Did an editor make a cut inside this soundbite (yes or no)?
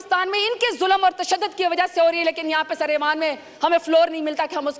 no